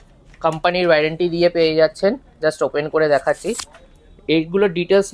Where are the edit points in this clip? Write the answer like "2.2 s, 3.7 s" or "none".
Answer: none